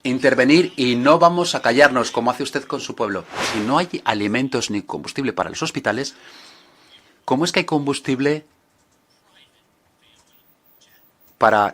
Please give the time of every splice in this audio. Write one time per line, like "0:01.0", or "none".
0:03.4